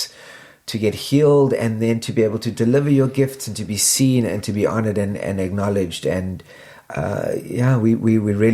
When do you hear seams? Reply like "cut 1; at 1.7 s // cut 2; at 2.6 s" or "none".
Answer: none

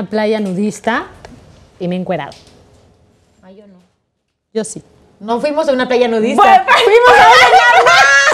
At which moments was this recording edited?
none

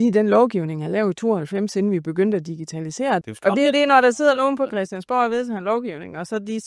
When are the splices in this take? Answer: cut 1; at 3.2 s

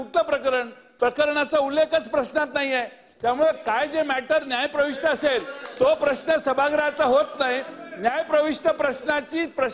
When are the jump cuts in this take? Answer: none

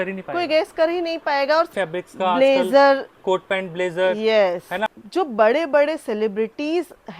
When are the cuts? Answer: cut 1; at 1.7 s // cut 2; at 4.9 s

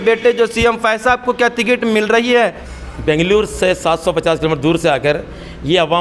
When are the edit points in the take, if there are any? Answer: cut 1; at 2.7 s

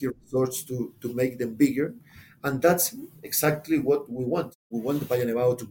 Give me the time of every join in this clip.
cut 1; at 4.6 s

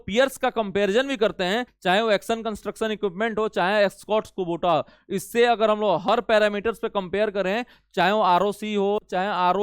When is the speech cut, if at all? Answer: cut 1; at 1.7 s

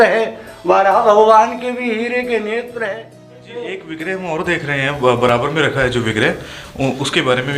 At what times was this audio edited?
cut 1; at 3.4 s

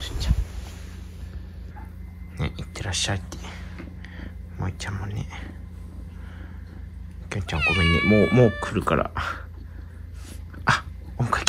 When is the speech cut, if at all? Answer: none

